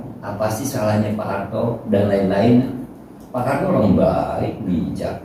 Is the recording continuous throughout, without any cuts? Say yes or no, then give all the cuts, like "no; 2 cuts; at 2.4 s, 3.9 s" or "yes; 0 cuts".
yes; 0 cuts